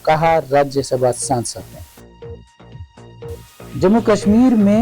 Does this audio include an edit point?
yes; 1 cut; at 1.6 s

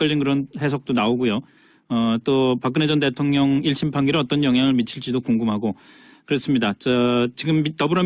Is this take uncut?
yes; 0 cuts

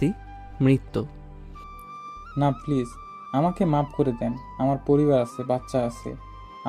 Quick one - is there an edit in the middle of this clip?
no; 0 cuts

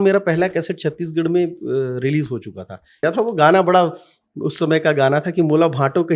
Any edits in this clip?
yes; 1 cut; at 3.0 s

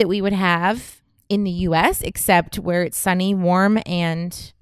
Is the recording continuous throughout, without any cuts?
no; 1 cut; at 1.0 s

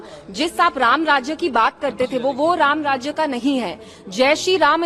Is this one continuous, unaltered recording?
yes; 0 cuts

